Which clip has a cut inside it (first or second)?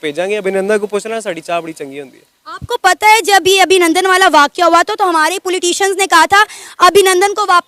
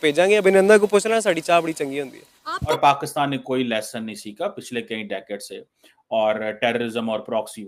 second